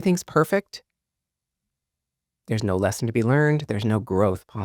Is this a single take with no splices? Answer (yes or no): yes